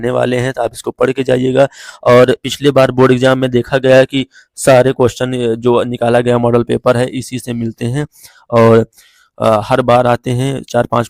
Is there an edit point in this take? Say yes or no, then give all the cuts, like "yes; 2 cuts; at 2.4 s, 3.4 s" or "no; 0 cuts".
no; 0 cuts